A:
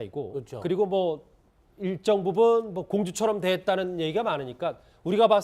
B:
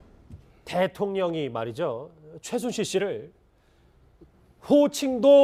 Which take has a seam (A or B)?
A